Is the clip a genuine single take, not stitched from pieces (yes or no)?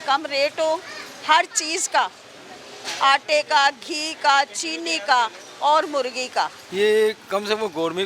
yes